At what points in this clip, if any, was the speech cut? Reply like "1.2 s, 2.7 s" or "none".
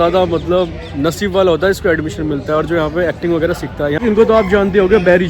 4.0 s